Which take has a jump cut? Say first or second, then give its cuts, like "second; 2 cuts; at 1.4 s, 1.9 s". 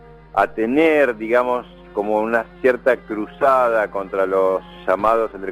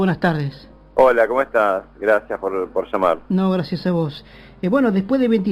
first; 1 cut; at 1.8 s